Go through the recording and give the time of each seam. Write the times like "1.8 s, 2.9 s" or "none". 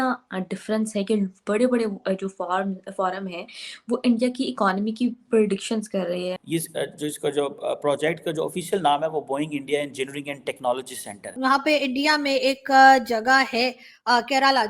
6.3 s, 11.3 s